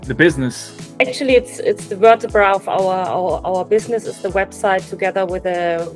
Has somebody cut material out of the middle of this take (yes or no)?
yes